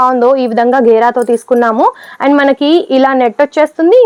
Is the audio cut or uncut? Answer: uncut